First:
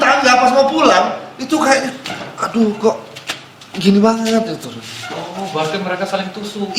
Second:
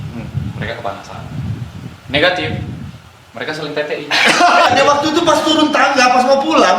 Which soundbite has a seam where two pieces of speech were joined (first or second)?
second